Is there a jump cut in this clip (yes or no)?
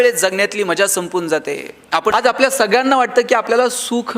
yes